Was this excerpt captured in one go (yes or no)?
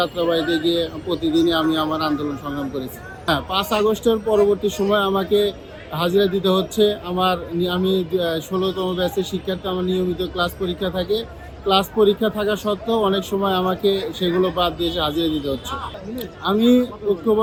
yes